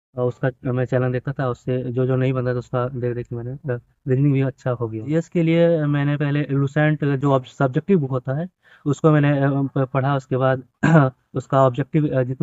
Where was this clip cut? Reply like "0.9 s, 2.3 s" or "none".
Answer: 5.1 s